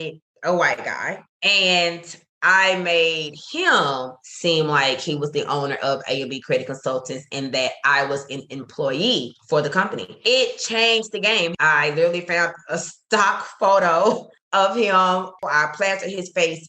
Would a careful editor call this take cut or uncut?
cut